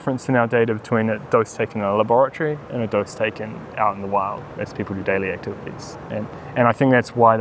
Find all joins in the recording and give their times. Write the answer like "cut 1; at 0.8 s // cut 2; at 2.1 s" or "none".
none

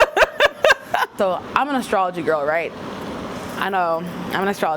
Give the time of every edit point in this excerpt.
cut 1; at 1.1 s

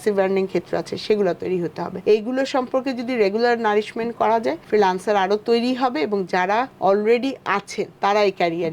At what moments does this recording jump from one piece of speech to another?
cut 1; at 1.9 s // cut 2; at 4.6 s // cut 3; at 6.7 s // cut 4; at 7.8 s

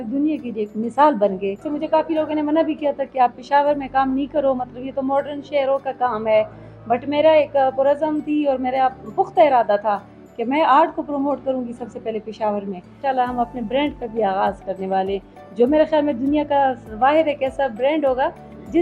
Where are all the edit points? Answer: cut 1; at 1.7 s // cut 2; at 13.0 s

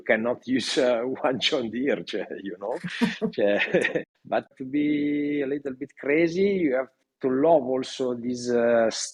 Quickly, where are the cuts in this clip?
none

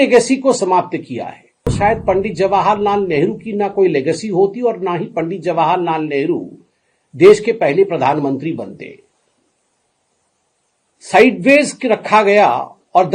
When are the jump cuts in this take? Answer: cut 1; at 1.7 s

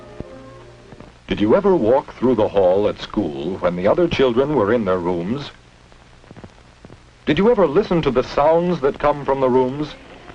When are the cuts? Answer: cut 1; at 9.0 s

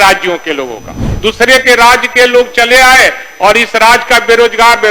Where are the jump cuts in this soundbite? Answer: cut 1; at 1.0 s

